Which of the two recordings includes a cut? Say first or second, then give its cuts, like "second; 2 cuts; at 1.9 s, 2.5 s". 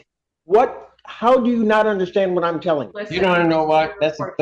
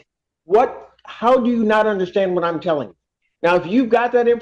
first; 1 cut; at 3.0 s